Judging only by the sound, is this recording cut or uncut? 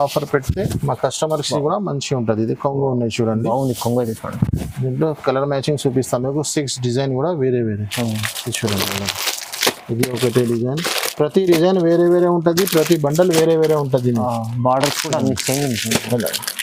uncut